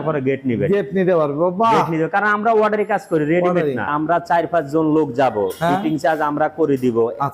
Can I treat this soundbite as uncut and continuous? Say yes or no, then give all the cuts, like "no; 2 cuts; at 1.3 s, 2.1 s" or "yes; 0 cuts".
no; 1 cut; at 3.9 s